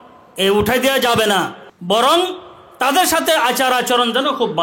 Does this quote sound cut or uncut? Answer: cut